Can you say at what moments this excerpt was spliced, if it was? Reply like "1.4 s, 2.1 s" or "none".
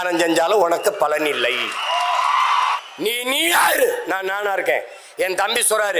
2.8 s